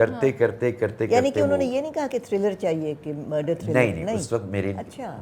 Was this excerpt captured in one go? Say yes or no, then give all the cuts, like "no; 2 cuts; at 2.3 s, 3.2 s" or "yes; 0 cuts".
yes; 0 cuts